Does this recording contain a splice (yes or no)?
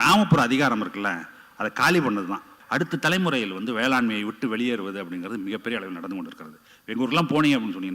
yes